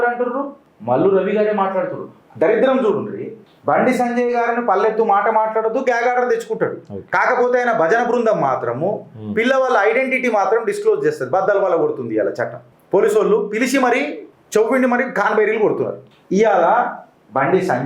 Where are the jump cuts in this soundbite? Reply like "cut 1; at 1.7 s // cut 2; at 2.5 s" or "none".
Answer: cut 1; at 2.1 s // cut 2; at 16.1 s